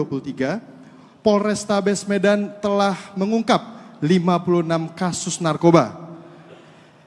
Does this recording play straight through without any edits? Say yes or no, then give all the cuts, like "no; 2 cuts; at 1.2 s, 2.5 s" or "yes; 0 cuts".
yes; 0 cuts